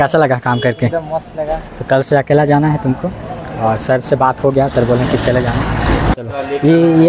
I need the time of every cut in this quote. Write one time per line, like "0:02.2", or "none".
0:06.1